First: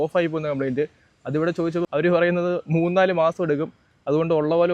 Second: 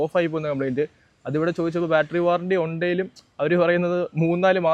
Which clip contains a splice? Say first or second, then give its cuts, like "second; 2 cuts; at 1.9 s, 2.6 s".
first; 1 cut; at 1.9 s